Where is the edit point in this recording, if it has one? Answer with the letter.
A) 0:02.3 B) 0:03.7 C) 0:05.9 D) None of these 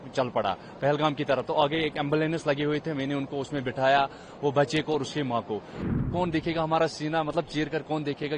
C